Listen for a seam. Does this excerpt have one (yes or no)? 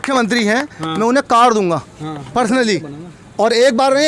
no